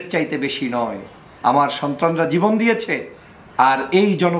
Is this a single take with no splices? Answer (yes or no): no